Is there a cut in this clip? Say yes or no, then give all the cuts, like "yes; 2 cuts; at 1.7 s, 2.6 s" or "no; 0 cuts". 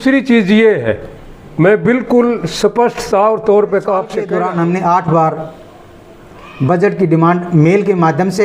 yes; 1 cut; at 4.2 s